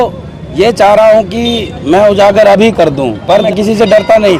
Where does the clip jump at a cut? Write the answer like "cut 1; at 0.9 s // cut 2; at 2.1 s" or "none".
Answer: cut 1; at 3.5 s